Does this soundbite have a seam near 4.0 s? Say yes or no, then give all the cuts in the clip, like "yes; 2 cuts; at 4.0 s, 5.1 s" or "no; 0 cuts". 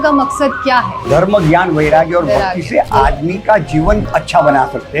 yes; 1 cut; at 4.0 s